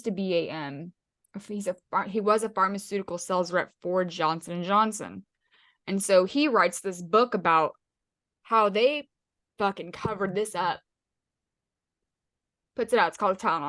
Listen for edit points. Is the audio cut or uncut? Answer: uncut